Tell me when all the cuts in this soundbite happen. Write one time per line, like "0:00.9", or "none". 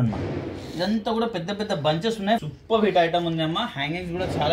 0:02.4